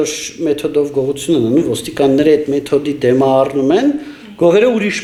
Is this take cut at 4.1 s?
no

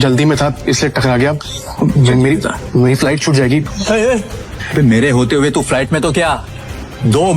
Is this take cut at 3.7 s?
yes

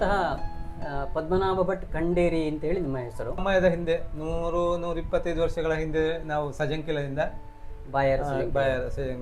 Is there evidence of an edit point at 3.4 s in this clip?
yes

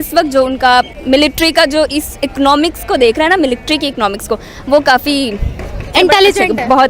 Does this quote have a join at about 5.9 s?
yes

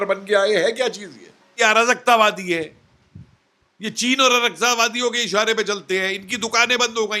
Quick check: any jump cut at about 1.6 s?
yes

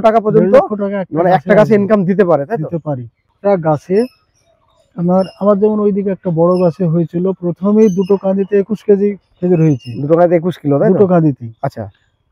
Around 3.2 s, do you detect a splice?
yes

